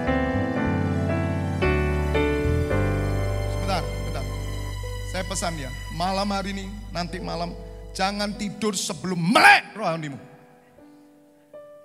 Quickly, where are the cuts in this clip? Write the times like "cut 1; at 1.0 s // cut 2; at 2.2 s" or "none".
none